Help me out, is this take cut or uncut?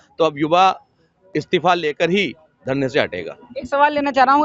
uncut